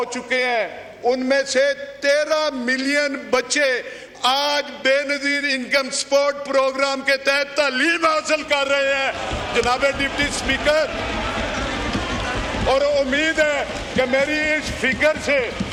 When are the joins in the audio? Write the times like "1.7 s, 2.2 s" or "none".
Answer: none

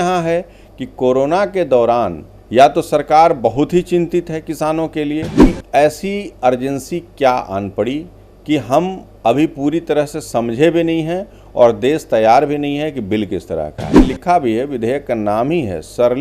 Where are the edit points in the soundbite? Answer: 5.6 s, 14.0 s

